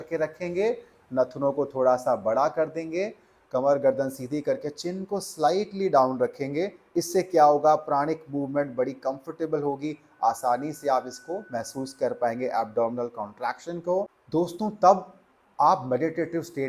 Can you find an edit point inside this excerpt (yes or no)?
yes